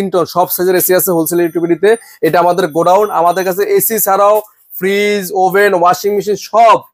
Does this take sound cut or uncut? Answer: uncut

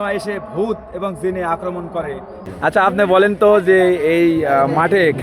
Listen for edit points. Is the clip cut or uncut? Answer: cut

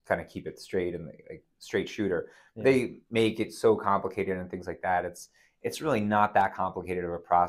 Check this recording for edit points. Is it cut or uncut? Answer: uncut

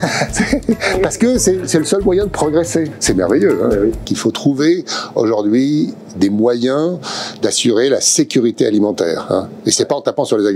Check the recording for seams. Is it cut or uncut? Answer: cut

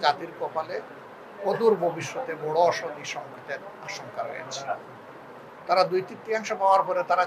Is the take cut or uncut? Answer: cut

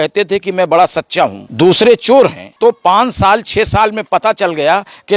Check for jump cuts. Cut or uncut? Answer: cut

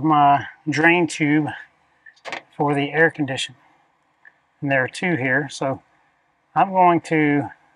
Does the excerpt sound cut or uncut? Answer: uncut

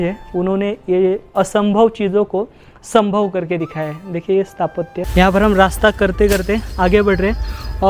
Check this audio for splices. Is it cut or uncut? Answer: cut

